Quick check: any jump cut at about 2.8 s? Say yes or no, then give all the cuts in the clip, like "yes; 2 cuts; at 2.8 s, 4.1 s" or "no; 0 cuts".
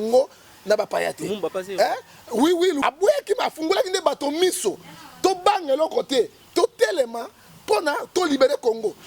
yes; 1 cut; at 2.8 s